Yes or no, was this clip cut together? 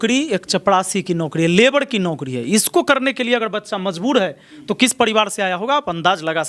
no